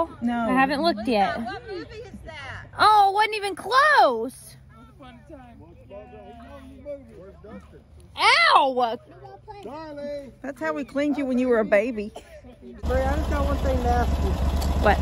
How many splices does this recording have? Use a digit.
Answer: 1